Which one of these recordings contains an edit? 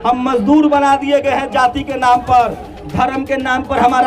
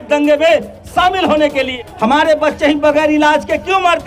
second; 1 cut; at 1.7 s

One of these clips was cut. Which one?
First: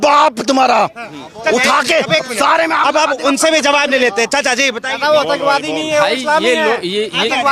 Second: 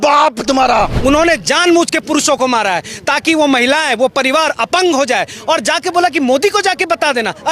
second; 1 cut; at 0.9 s

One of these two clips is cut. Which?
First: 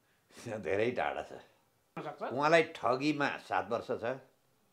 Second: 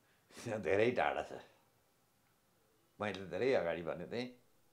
first; 1 cut; at 2.1 s

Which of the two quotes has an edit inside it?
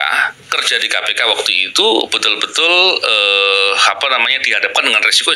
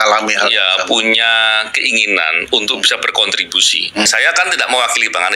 second; 1 cut; at 4.1 s

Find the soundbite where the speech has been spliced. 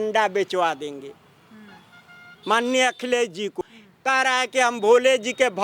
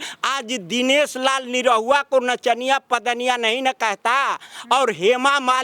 first; 1 cut; at 3.6 s

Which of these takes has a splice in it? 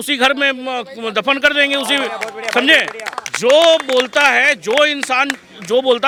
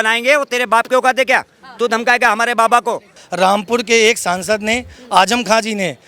second; 1 cut; at 3.2 s

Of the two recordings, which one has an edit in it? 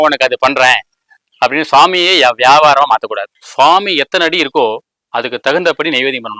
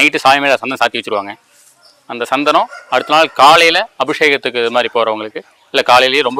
first; 1 cut; at 3.4 s

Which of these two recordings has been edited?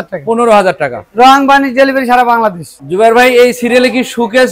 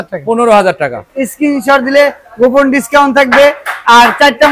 second; 1 cut; at 1.1 s

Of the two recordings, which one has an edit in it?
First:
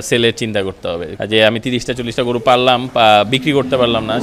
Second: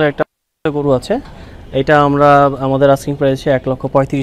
first; 1 cut; at 1.2 s

